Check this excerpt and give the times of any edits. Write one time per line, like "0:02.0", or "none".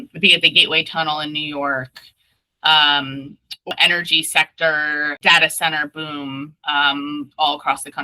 0:03.7
0:05.2